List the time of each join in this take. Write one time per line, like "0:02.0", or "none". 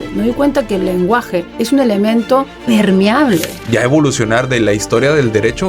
0:01.5
0:02.5
0:03.5